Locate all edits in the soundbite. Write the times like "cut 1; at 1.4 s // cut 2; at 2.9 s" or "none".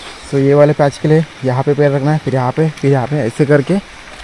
none